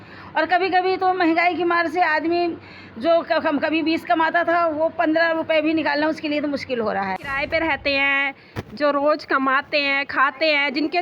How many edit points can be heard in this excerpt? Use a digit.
1